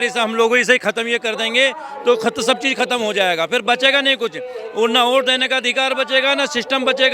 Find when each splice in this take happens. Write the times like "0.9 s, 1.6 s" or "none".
none